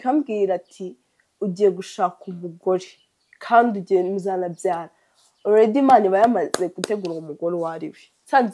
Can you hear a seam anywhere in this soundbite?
no; 0 cuts

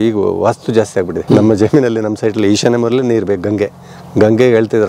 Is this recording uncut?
no; 1 cut; at 1.2 s

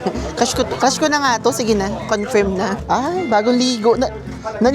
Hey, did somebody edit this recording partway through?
yes; 1 cut; at 2.8 s

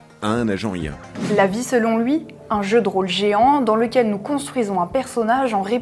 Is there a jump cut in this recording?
yes; 1 cut; at 1.2 s

